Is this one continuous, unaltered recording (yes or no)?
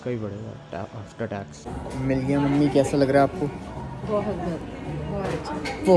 no